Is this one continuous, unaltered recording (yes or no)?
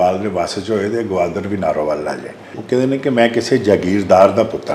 no